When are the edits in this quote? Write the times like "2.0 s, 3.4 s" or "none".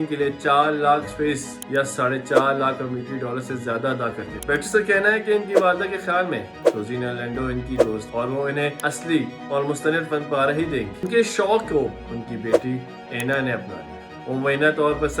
4.3 s, 11.1 s